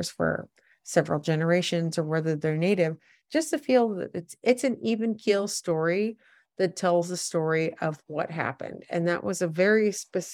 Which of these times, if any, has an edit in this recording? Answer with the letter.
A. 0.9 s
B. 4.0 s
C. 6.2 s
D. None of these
D